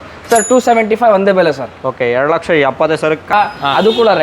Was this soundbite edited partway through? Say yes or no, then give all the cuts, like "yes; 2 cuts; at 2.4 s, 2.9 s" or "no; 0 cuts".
yes; 1 cut; at 3.3 s